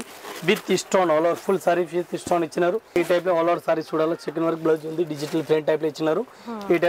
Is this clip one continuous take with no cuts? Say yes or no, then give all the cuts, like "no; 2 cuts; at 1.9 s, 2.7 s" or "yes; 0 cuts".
no; 1 cut; at 3.0 s